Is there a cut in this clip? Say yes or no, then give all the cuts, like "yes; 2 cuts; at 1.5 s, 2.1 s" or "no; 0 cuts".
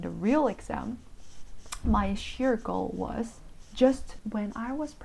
yes; 1 cut; at 4.1 s